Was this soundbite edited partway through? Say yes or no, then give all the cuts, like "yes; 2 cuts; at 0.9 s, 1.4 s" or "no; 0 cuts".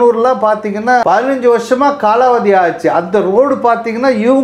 yes; 1 cut; at 1.0 s